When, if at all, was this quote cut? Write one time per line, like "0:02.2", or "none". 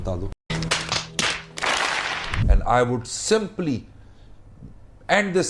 0:02.5